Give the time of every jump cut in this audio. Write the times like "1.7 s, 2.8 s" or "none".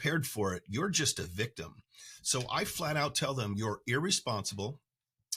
none